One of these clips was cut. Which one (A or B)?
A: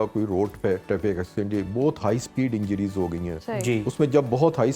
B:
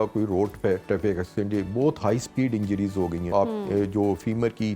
B